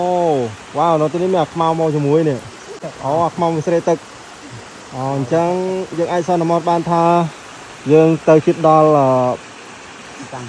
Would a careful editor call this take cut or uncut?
uncut